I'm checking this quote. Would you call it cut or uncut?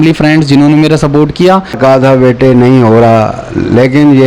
cut